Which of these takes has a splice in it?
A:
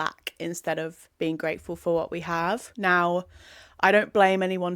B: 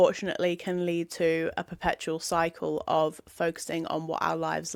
A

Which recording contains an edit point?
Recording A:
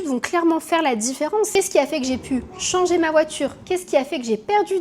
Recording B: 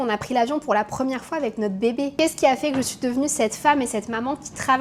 A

